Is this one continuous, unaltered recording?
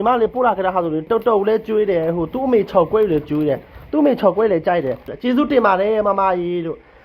no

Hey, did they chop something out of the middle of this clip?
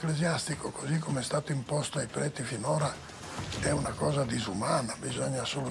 no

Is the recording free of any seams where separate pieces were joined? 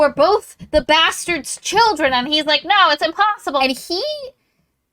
no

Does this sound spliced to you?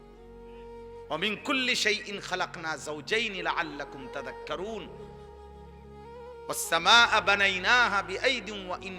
yes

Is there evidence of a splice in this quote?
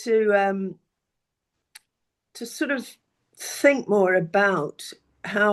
no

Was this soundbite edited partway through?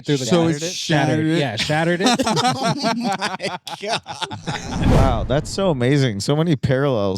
yes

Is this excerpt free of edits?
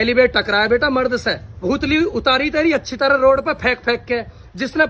no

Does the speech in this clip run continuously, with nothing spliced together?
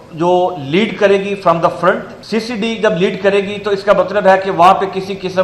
no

